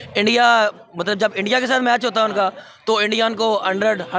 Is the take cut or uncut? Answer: uncut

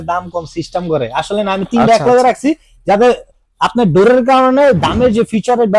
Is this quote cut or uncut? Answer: uncut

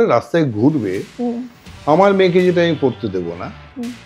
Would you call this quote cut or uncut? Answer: uncut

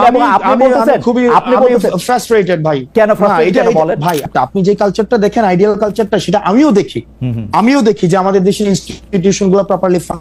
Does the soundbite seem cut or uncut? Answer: cut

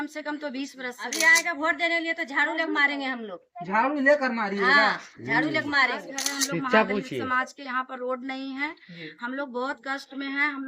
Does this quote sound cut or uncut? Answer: cut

